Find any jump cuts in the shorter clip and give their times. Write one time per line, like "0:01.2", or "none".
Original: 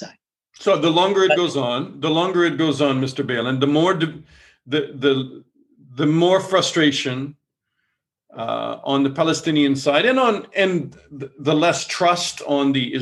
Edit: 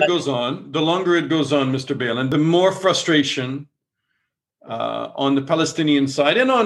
0:02.3